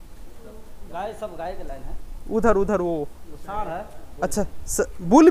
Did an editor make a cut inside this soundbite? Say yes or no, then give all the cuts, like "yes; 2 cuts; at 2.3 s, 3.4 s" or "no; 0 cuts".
no; 0 cuts